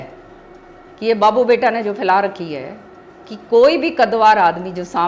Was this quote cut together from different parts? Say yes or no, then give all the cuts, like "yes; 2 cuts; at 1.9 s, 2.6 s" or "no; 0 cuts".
no; 0 cuts